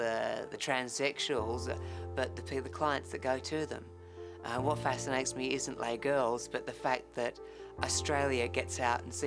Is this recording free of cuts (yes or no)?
yes